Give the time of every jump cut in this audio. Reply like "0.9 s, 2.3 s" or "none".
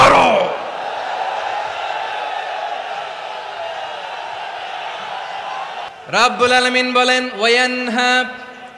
none